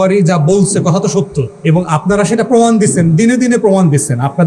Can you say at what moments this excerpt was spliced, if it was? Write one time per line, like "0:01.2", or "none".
0:01.5